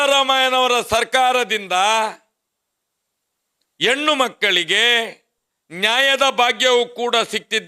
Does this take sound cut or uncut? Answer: uncut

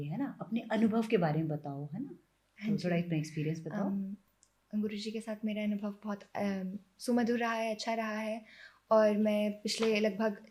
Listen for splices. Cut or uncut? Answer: uncut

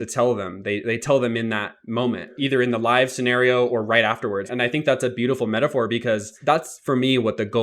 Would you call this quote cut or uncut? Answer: cut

